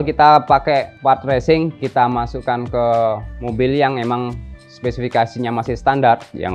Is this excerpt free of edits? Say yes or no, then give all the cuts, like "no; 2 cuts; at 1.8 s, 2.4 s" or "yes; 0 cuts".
yes; 0 cuts